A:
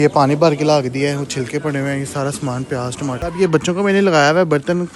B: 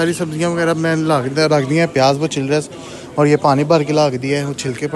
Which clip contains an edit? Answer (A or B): A